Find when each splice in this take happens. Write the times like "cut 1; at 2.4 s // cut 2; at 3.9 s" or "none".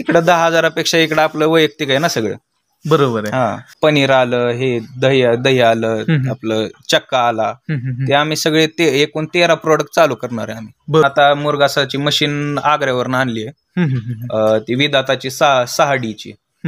cut 1; at 3.6 s // cut 2; at 11.0 s